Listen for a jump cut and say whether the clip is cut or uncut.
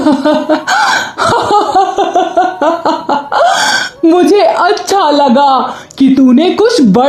uncut